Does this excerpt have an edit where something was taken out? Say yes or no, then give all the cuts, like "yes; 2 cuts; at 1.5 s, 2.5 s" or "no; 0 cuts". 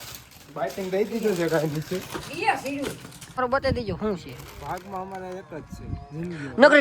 yes; 1 cut; at 3.4 s